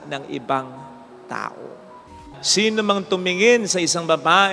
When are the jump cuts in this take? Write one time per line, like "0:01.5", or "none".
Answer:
0:02.1